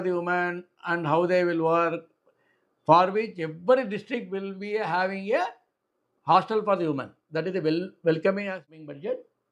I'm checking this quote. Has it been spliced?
yes; 1 cut; at 8.5 s

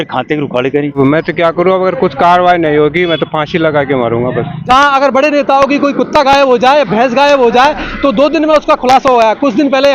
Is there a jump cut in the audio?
yes; 2 cuts; at 0.9 s, 4.7 s

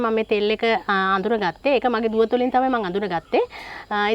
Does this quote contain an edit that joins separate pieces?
no; 0 cuts

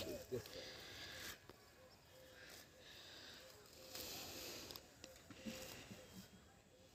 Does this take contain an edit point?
no; 0 cuts

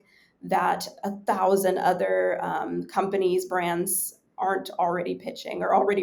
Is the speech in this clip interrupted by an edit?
no; 0 cuts

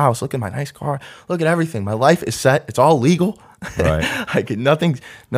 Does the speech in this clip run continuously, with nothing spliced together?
yes; 0 cuts

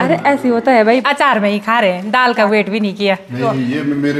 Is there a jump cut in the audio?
yes; 1 cut; at 1.0 s

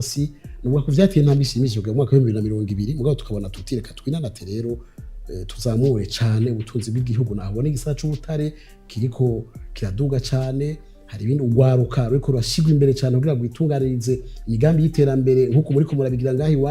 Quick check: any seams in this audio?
no; 0 cuts

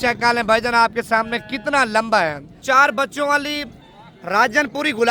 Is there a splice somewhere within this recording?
yes; 1 cut; at 2.6 s

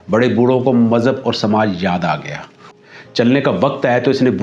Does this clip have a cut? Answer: yes; 1 cut; at 2.6 s

